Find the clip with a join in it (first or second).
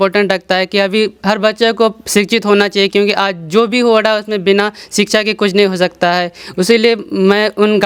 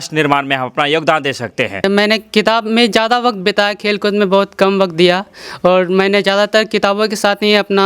second